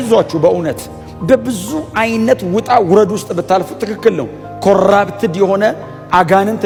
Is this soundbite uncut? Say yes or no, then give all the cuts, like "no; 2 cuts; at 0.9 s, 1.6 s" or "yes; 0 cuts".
yes; 0 cuts